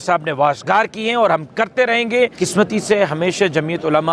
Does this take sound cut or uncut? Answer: cut